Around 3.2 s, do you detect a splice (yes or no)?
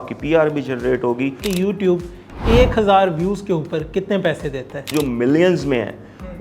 no